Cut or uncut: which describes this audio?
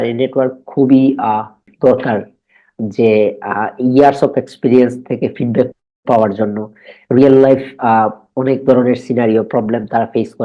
cut